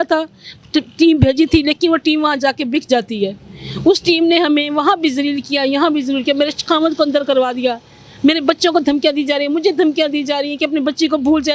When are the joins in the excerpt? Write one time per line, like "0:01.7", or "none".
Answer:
none